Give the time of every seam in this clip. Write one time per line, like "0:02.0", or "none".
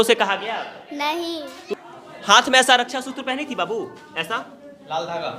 0:01.6